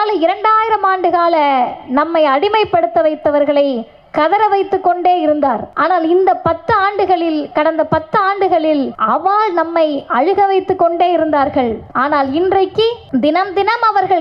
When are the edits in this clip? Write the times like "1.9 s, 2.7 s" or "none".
5.7 s, 9.0 s, 11.9 s, 13.0 s